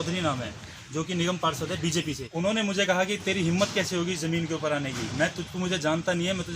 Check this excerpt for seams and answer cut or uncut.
cut